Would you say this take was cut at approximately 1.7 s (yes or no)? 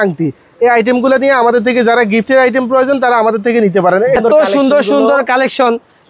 no